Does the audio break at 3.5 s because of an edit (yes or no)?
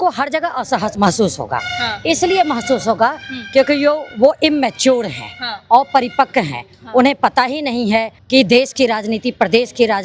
no